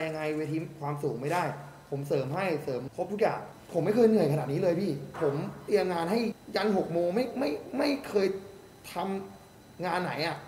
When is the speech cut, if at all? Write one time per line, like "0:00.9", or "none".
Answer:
0:02.9
0:03.5
0:06.4